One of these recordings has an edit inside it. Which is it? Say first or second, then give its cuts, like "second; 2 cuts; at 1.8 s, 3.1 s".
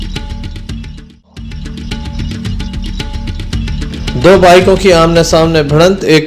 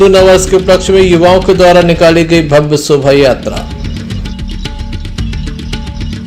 first; 1 cut; at 1.8 s